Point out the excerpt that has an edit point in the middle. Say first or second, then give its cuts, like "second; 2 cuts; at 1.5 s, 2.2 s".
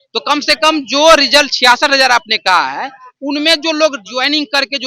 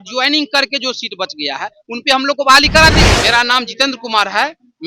second; 1 cut; at 3.1 s